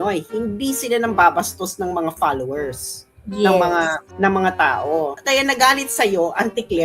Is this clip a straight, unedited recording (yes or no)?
no